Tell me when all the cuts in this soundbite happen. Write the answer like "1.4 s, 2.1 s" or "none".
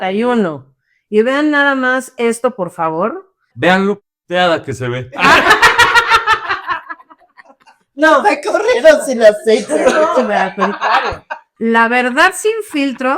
3.4 s, 11.4 s